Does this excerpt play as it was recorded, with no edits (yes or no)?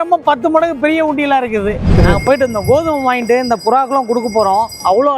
no